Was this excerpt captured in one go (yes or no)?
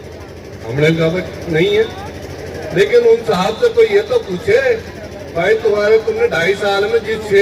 yes